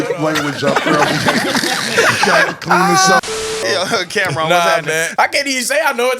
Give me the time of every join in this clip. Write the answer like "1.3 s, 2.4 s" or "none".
3.6 s, 5.1 s